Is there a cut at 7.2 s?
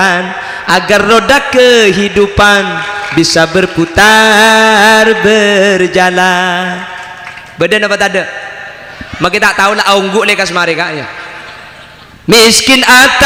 no; 0 cuts

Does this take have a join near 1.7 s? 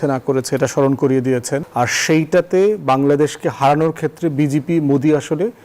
yes; 1 cut; at 1.7 s

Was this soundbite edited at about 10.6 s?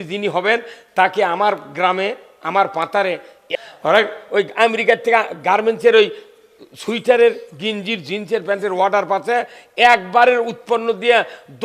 no; 1 cut; at 3.4 s

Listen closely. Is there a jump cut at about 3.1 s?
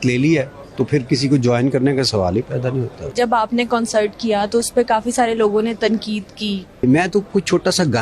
yes; 2 cuts; at 3.1 s, 6.8 s

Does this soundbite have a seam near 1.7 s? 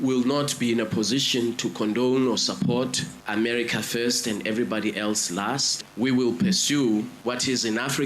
no; 2 cuts; at 5.8 s, 7.1 s

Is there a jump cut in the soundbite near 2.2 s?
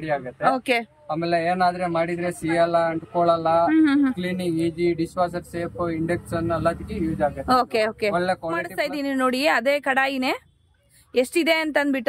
no; 1 cut; at 8.7 s

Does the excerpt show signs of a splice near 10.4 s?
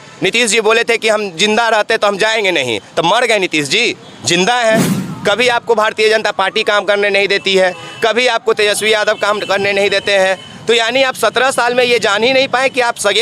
no; 1 cut; at 5.0 s

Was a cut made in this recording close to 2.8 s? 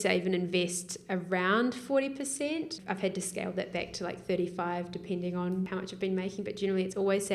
yes; 2 cuts; at 2.8 s, 5.7 s

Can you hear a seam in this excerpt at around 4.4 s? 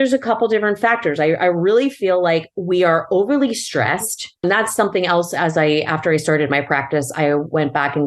yes; 1 cut; at 4.4 s

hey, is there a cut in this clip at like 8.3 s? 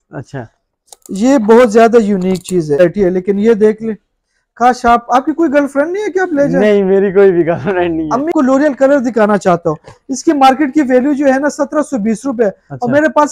yes; 2 cuts; at 2.8 s, 8.3 s

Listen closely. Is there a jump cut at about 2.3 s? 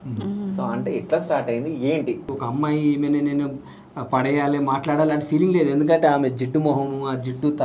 yes; 1 cut; at 2.3 s

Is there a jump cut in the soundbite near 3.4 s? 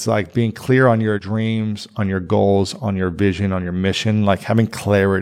no; 1 cut; at 1.2 s

